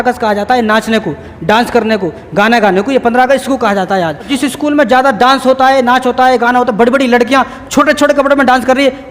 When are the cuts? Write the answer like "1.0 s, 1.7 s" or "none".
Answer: 4.3 s